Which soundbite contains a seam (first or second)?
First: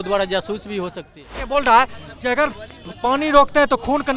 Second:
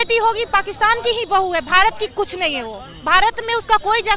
first